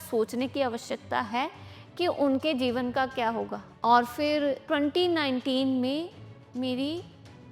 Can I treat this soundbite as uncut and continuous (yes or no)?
no